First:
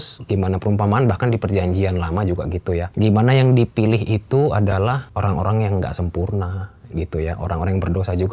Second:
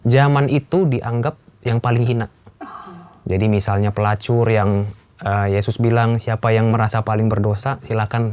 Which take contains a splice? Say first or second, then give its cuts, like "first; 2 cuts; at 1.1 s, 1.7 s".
first; 2 cuts; at 2.9 s, 5.1 s